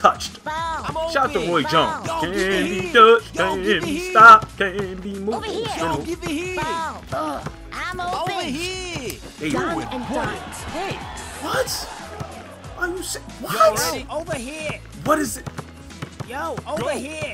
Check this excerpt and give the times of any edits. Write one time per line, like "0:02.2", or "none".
none

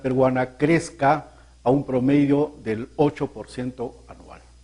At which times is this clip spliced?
0:02.6

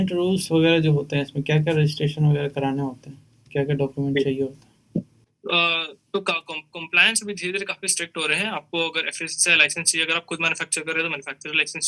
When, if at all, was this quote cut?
none

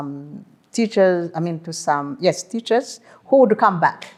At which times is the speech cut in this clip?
none

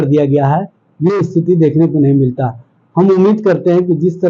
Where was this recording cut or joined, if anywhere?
none

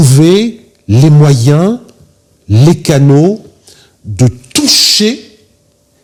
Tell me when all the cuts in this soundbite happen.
none

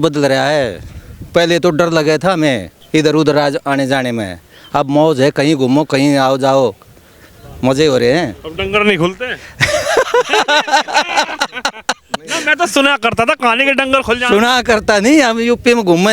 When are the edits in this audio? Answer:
0:02.7

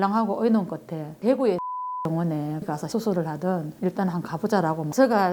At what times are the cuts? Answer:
0:01.0

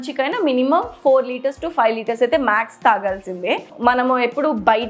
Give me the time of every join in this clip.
0:03.7

